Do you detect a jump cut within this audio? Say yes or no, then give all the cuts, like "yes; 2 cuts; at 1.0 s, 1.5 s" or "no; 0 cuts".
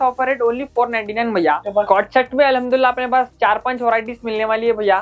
yes; 1 cut; at 1.7 s